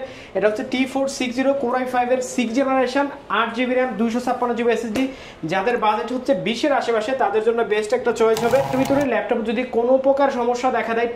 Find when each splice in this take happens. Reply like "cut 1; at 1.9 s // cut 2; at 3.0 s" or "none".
cut 1; at 8.7 s